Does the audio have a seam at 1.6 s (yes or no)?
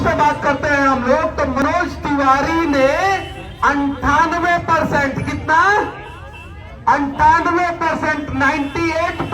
yes